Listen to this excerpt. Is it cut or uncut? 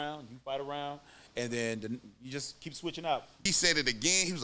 cut